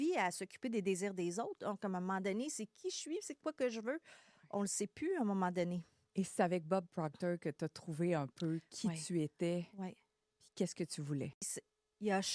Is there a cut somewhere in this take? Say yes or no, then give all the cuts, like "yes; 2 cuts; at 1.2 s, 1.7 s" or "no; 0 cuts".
yes; 1 cut; at 11.4 s